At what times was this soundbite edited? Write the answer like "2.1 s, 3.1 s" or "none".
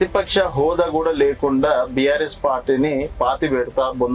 none

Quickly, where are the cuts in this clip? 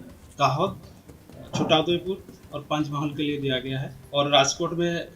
3.9 s

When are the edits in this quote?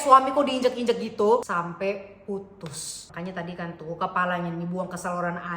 1.4 s

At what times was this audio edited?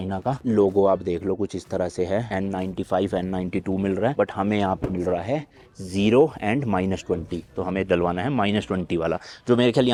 none

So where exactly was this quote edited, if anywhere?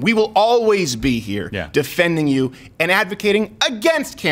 none

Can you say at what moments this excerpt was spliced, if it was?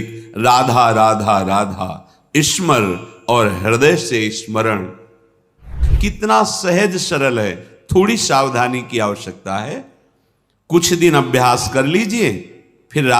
5.8 s

